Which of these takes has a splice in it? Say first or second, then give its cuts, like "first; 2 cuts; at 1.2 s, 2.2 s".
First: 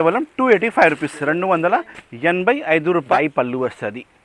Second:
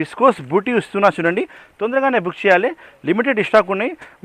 first; 1 cut; at 3.1 s